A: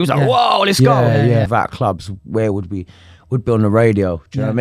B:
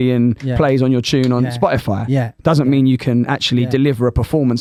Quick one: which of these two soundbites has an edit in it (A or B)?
A